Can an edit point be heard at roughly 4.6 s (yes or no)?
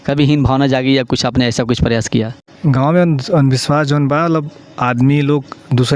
no